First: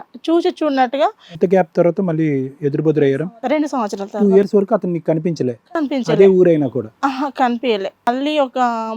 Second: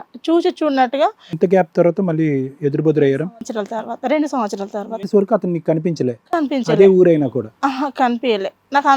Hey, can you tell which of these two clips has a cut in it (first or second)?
first